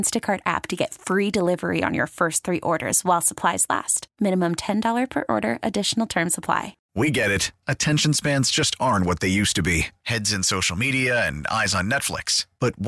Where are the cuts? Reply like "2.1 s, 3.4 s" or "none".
6.8 s